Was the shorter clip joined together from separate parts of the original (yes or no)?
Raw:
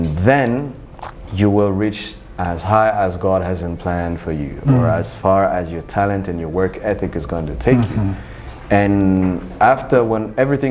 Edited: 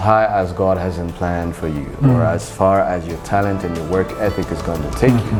no